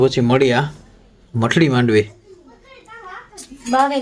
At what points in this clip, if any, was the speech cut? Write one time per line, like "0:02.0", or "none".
none